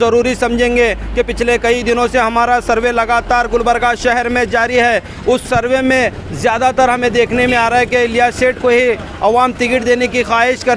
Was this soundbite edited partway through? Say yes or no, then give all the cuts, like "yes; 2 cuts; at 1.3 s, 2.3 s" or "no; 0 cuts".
no; 0 cuts